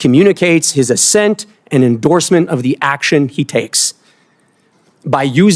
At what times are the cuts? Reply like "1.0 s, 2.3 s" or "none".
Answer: 4.7 s